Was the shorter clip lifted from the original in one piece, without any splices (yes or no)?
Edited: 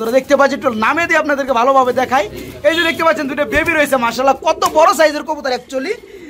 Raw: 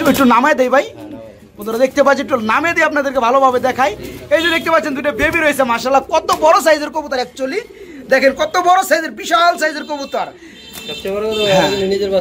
yes